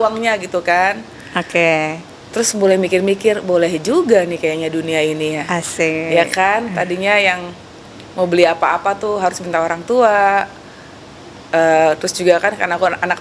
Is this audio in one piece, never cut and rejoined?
yes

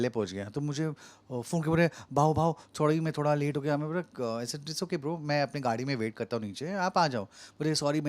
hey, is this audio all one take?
yes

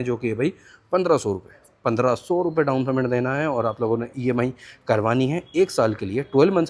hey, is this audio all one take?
yes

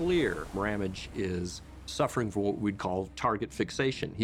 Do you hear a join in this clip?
no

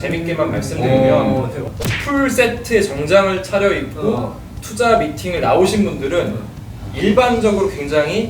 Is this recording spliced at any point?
no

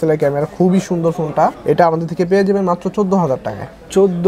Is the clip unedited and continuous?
yes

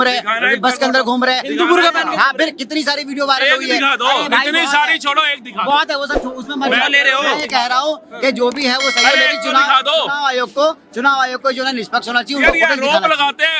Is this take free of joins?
yes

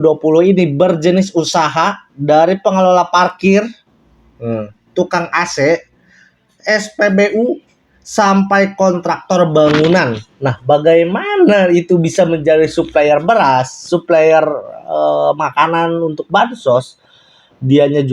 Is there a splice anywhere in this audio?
no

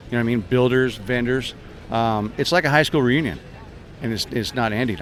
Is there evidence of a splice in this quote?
no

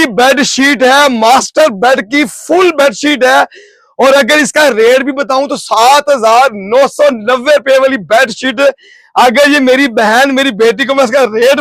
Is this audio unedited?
yes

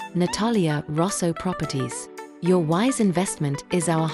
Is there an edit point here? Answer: no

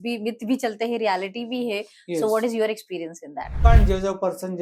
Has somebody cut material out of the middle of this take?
yes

